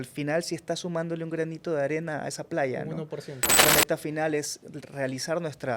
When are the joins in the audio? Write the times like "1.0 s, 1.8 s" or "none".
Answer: 3.5 s